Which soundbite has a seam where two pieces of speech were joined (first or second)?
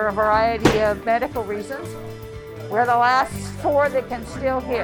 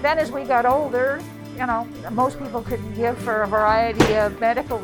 second